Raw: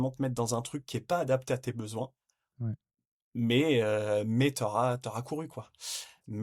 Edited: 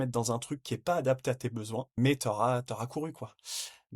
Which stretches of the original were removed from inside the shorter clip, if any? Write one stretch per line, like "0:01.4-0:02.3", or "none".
0:02.2-0:04.3